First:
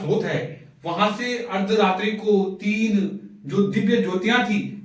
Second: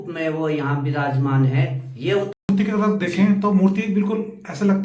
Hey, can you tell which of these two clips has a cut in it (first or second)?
second